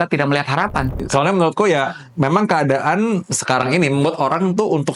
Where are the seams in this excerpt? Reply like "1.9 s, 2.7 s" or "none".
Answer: 1.0 s